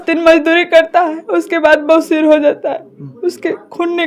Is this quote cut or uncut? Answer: uncut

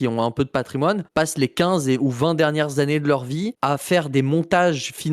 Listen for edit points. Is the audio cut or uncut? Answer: cut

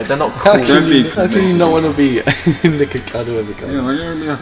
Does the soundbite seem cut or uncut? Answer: cut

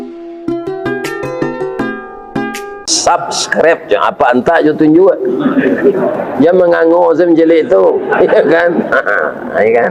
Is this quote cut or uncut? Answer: uncut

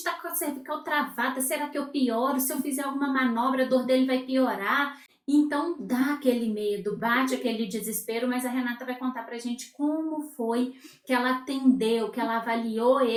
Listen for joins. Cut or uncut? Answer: uncut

